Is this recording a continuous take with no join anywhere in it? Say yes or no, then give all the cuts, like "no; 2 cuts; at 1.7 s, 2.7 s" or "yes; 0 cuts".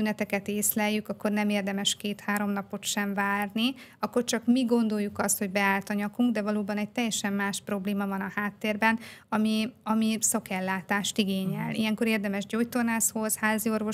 yes; 0 cuts